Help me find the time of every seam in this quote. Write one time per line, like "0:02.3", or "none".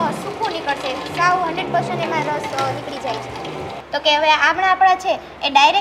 0:03.8